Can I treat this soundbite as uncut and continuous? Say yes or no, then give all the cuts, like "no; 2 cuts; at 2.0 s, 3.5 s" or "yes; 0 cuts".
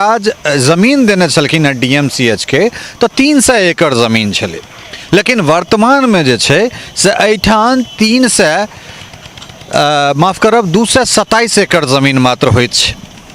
yes; 0 cuts